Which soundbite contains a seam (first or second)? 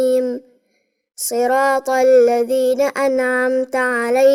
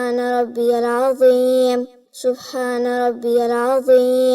second